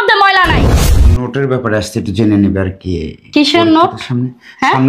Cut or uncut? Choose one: cut